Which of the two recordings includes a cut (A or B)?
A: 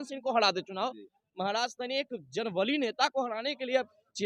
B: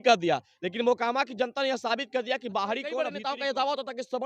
B